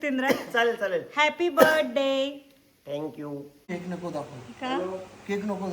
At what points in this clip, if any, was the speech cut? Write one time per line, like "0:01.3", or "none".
0:03.7